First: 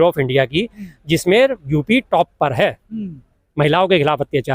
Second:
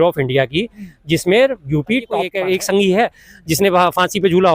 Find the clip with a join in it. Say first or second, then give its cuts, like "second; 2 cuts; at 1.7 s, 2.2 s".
second; 1 cut; at 2.3 s